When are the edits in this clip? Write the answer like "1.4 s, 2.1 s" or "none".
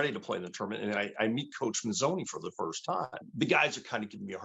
3.3 s